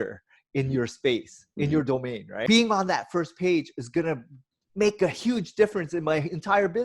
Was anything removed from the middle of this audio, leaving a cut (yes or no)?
yes